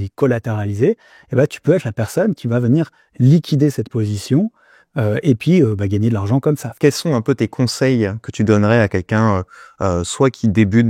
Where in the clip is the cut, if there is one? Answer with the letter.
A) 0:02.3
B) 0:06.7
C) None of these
B